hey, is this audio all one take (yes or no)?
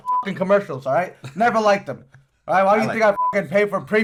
yes